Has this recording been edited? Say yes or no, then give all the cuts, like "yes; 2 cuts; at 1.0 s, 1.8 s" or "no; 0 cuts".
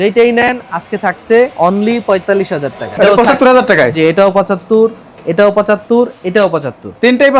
yes; 2 cuts; at 1.5 s, 2.8 s